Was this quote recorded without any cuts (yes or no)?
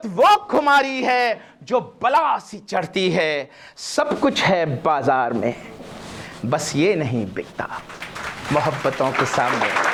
yes